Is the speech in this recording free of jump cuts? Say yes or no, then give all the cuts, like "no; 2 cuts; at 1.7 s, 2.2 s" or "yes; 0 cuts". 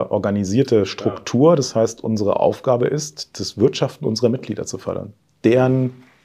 yes; 0 cuts